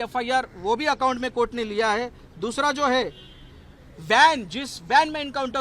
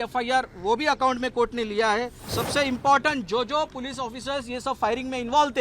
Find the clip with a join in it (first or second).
second